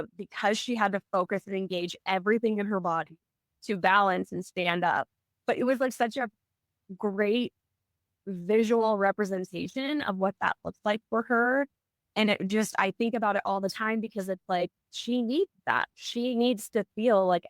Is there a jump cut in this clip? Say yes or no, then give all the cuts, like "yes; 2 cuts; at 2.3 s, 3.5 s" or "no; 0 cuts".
yes; 1 cut; at 15.9 s